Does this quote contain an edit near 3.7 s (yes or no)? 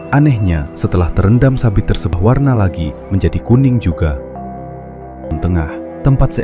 no